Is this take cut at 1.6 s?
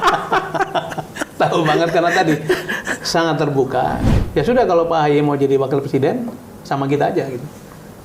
no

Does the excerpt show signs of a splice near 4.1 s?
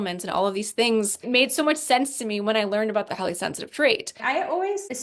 yes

